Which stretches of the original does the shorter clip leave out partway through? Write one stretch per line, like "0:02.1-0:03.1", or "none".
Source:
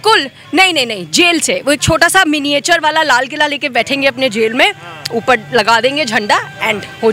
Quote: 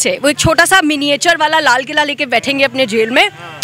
none